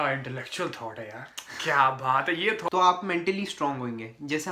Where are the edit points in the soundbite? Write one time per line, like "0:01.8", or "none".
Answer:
0:02.6